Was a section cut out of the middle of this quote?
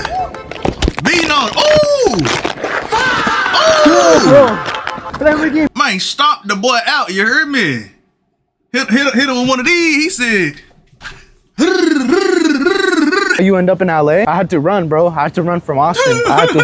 yes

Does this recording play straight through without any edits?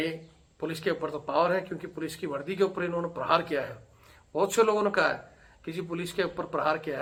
yes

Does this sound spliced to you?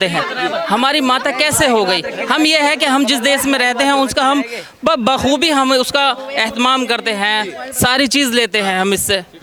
no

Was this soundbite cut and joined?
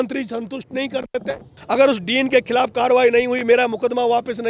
yes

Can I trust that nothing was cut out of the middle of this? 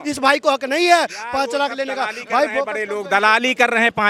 yes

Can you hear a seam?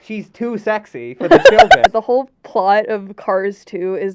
yes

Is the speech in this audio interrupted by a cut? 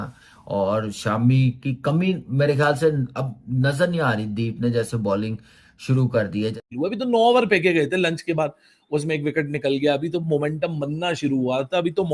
yes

